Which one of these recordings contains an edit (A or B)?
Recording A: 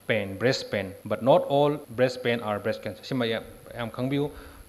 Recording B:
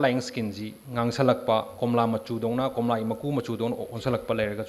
A